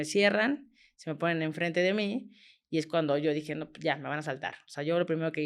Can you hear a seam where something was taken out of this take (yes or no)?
no